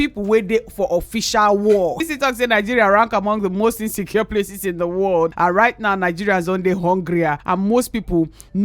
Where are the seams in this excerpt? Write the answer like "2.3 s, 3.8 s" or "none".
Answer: 2.0 s, 5.3 s, 7.4 s